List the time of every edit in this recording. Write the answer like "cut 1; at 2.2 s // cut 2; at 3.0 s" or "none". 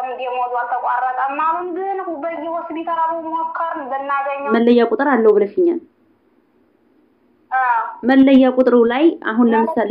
cut 1; at 4.5 s